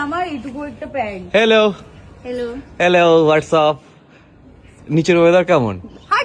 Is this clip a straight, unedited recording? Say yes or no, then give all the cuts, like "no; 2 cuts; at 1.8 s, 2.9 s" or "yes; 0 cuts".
yes; 0 cuts